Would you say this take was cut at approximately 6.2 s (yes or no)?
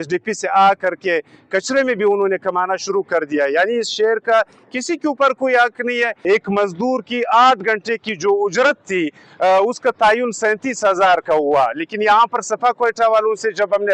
yes